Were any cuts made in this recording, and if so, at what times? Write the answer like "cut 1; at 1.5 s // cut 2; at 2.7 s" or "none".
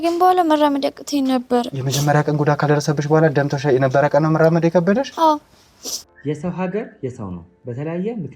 cut 1; at 6.0 s

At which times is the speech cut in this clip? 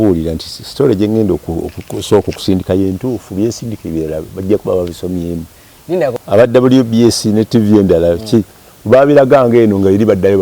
cut 1; at 6.2 s

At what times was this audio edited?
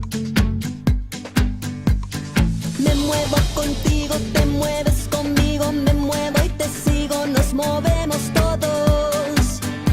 cut 1; at 1.4 s

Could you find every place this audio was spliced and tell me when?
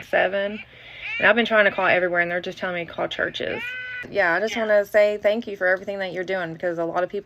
cut 1; at 4.1 s

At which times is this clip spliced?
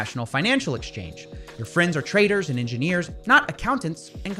none

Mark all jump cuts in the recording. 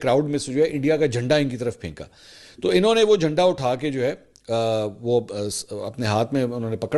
none

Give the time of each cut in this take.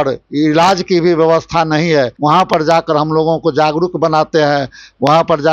cut 1; at 2.1 s

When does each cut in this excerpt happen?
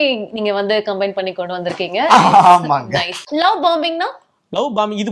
cut 1; at 3.2 s

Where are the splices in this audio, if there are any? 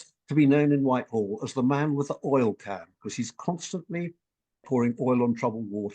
cut 1; at 4.6 s

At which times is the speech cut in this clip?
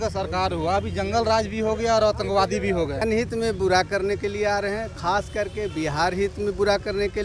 cut 1; at 3.0 s

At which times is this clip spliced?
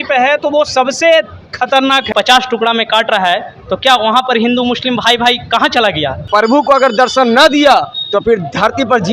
cut 1; at 2.1 s // cut 2; at 6.2 s

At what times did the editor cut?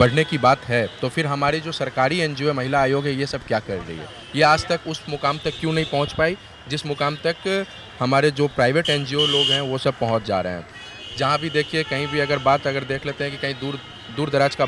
none

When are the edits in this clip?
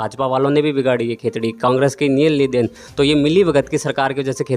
none

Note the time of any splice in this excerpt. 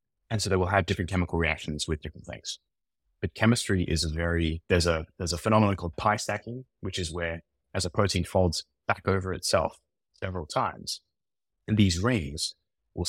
cut 1; at 4.6 s

